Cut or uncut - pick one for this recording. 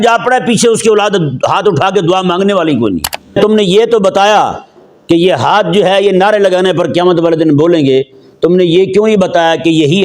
cut